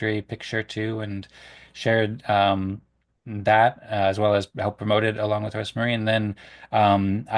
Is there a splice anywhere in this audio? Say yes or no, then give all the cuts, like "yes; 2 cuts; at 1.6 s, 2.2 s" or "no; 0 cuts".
no; 0 cuts